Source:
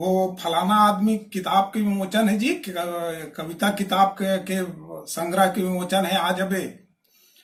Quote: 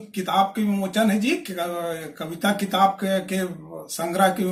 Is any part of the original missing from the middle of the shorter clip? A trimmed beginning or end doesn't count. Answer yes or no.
no